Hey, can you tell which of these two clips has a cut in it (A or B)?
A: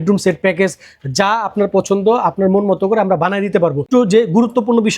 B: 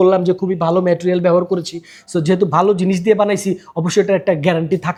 A